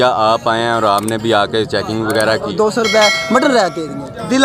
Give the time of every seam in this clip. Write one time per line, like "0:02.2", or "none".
0:02.5